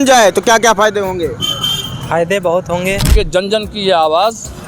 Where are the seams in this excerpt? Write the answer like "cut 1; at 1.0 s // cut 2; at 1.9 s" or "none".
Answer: cut 1; at 3.1 s